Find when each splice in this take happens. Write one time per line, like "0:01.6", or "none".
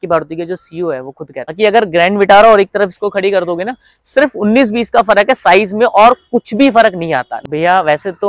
0:01.5
0:07.3